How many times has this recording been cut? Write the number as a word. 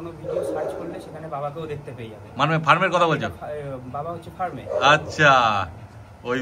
zero